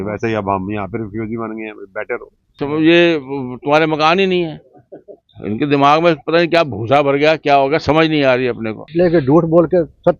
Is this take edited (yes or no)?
yes